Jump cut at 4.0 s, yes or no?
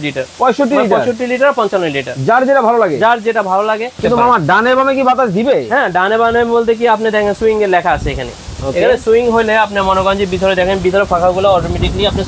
yes